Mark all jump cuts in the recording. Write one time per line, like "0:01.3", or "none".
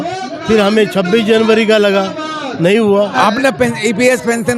0:03.1